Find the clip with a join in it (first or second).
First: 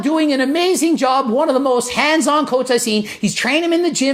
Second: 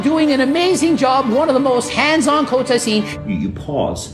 second